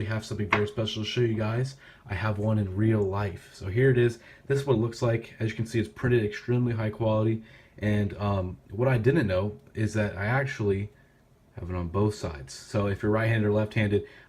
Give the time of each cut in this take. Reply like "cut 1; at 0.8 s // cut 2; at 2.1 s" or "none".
cut 1; at 7.9 s

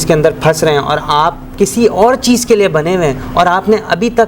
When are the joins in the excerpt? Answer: none

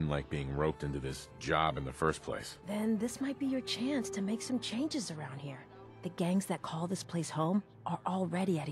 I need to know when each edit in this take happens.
none

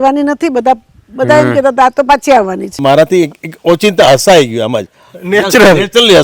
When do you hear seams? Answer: cut 1; at 2.7 s

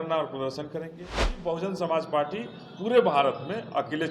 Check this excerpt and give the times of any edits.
cut 1; at 1.4 s

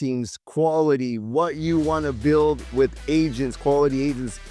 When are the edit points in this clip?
none

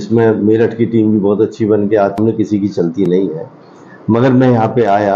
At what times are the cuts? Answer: cut 1; at 2.2 s

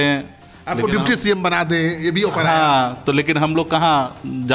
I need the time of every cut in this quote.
none

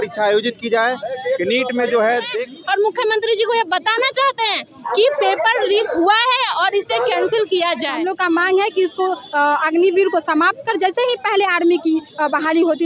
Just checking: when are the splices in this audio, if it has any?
cut 1; at 2.4 s // cut 2; at 8.0 s

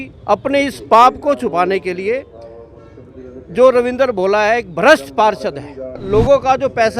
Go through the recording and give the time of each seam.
cut 1; at 6.0 s

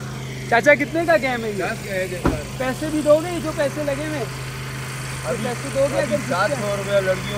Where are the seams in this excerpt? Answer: none

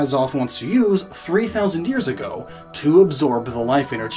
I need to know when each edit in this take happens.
cut 1; at 1.7 s

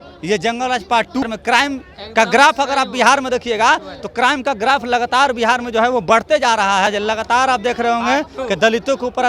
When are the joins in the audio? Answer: cut 1; at 1.2 s // cut 2; at 6.9 s

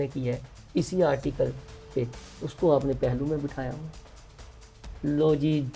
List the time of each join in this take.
none

